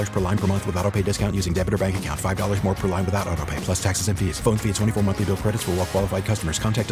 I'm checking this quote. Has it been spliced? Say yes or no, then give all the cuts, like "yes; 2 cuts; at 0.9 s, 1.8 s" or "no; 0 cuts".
no; 0 cuts